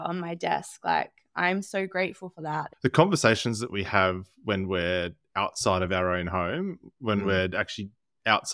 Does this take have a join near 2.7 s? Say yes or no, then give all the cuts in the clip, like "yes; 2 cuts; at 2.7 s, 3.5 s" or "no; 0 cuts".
yes; 1 cut; at 2.7 s